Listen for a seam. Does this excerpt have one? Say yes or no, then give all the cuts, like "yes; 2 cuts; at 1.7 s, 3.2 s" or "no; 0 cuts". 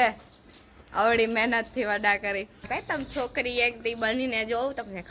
yes; 1 cut; at 2.7 s